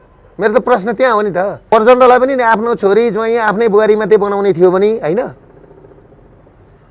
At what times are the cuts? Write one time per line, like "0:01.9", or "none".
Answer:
0:01.6